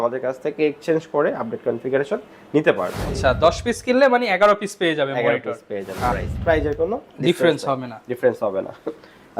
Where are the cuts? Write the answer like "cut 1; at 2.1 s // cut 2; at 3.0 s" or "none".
cut 1; at 3.1 s // cut 2; at 6.1 s